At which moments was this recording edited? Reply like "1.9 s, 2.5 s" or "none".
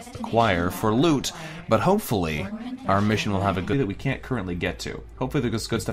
none